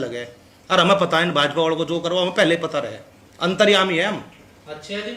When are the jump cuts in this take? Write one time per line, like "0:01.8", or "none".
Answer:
none